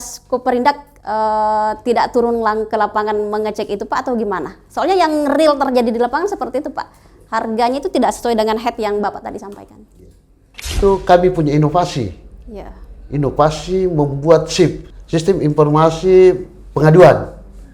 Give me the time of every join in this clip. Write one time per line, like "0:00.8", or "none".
0:10.5